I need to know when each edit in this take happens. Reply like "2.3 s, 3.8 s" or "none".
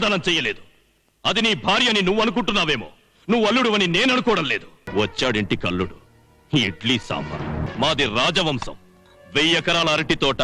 4.9 s, 7.7 s